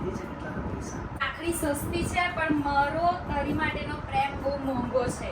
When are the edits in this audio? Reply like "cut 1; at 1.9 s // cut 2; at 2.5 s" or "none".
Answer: cut 1; at 1.2 s